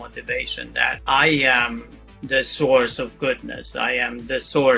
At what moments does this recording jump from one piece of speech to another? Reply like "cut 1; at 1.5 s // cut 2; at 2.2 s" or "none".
cut 1; at 1.0 s